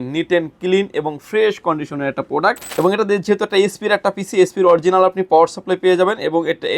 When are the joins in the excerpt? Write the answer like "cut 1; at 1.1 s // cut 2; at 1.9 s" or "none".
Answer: cut 1; at 2.7 s